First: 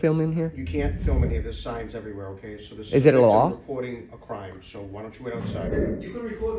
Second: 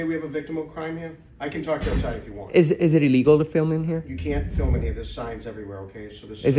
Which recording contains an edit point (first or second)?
first